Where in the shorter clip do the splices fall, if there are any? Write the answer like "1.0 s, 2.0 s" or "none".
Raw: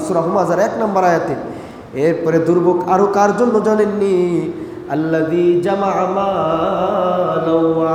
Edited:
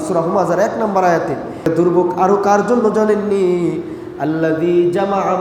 1.6 s